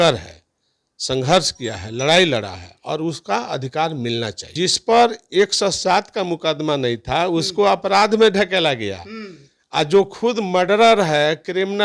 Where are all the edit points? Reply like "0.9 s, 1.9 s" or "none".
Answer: 4.4 s